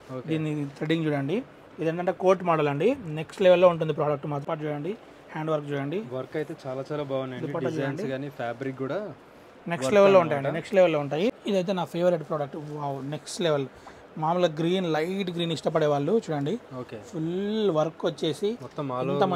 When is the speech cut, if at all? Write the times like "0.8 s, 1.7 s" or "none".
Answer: 4.4 s, 11.3 s